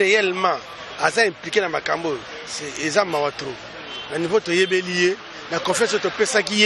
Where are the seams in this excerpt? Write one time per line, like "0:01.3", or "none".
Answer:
none